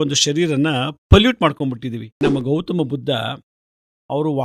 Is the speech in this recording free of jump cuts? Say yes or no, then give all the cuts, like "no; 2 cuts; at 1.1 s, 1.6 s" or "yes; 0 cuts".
no; 1 cut; at 2.2 s